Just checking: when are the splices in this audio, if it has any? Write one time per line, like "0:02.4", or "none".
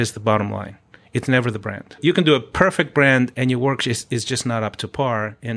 0:02.0
0:03.3

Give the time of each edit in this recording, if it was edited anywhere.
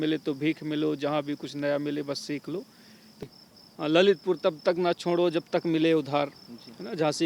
0:03.2

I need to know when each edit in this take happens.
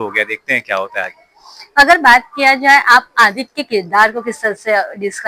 none

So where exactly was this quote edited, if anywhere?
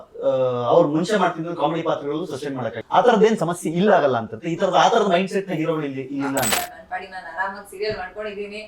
0:02.8
0:06.5

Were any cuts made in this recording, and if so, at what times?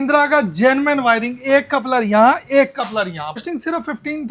0:03.4

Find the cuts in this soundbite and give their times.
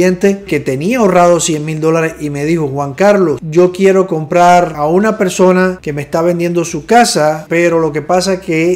0:03.4
0:04.8
0:05.9
0:07.4

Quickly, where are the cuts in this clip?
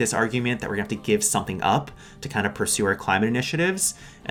none

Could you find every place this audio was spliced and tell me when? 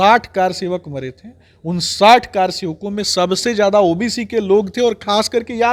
none

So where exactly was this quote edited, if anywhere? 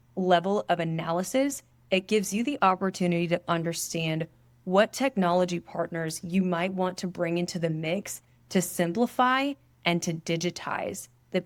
none

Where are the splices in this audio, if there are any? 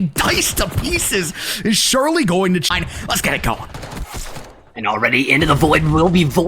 0:02.7

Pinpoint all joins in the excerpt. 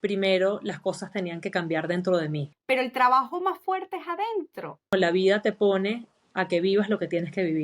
0:02.5
0:04.9

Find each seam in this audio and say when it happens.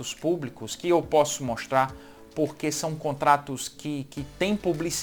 none

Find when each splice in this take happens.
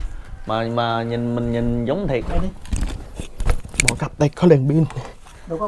0:02.2

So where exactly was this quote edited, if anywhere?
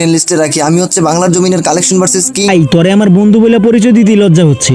0:02.5

